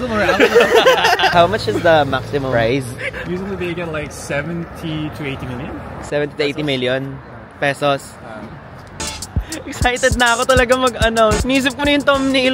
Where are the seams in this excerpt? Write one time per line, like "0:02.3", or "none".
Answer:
0:01.3
0:09.0
0:11.4